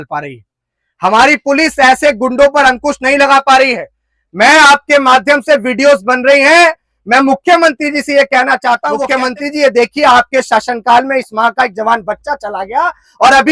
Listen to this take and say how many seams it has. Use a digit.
1